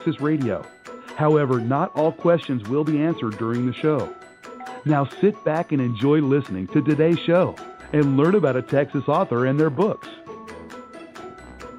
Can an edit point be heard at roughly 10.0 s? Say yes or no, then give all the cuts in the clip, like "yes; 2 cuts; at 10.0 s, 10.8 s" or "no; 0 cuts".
yes; 1 cut; at 10.0 s